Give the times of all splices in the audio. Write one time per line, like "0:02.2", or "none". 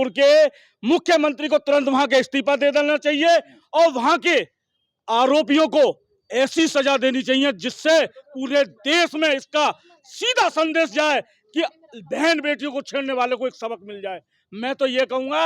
none